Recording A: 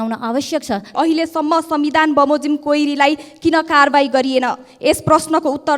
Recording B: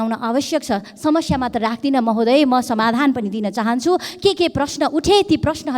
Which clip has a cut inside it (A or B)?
A